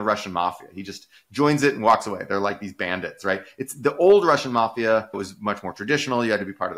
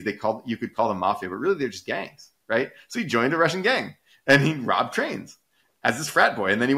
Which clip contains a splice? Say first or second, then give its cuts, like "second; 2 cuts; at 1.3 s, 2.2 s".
first; 1 cut; at 5.2 s